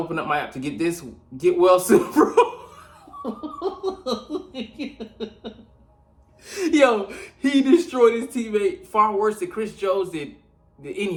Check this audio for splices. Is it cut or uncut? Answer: uncut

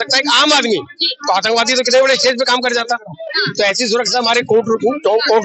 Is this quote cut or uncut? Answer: uncut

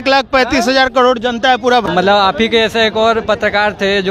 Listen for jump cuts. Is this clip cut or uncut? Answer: cut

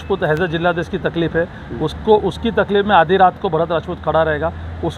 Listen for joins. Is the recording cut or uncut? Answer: uncut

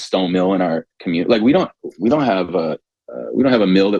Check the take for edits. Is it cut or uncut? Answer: uncut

